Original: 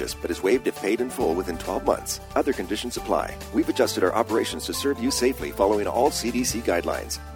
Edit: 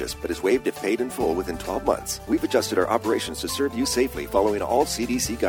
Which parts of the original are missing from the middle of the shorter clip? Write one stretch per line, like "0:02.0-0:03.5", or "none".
0:02.1-0:03.4